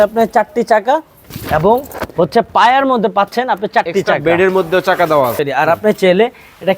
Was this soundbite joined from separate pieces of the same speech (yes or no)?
yes